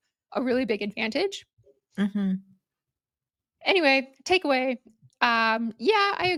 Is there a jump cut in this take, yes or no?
no